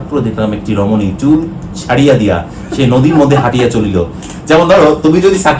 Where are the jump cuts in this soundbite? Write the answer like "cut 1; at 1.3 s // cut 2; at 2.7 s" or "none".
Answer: cut 1; at 4.2 s

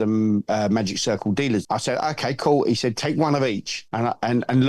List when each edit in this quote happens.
cut 1; at 1.6 s // cut 2; at 3.8 s

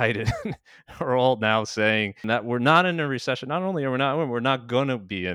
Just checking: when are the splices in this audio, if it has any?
cut 1; at 2.2 s

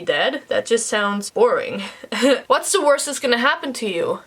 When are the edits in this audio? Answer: cut 1; at 1.2 s // cut 2; at 2.4 s

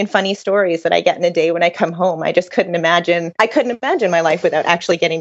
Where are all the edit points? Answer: cut 1; at 3.7 s

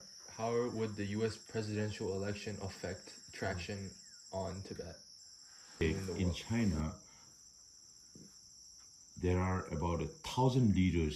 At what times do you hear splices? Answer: cut 1; at 5.8 s

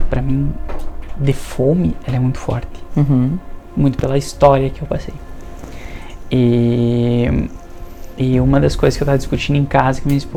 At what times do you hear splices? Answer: none

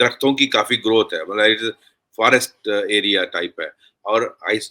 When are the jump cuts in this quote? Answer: none

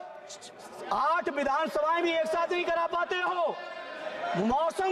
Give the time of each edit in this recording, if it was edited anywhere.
none

